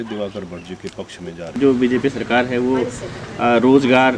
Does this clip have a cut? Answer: yes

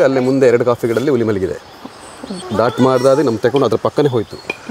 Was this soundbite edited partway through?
yes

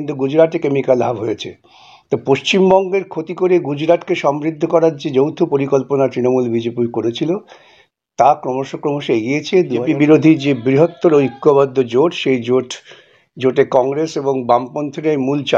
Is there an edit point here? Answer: yes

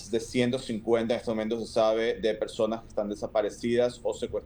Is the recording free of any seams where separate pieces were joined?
yes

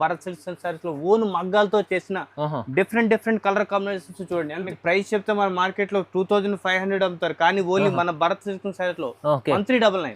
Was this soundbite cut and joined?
yes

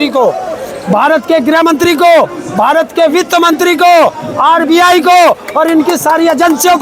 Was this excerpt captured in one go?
yes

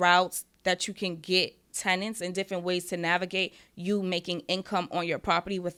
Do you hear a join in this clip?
no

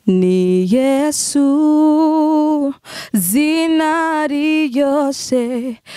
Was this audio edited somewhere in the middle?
no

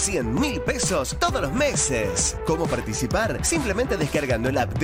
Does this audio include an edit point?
no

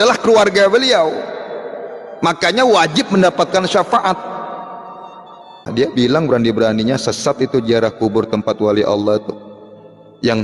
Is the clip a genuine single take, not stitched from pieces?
no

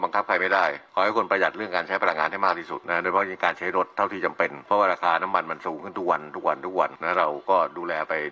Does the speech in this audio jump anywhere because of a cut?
yes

